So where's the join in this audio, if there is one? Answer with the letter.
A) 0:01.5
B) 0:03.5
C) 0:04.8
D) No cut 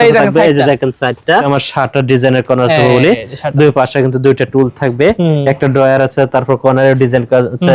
A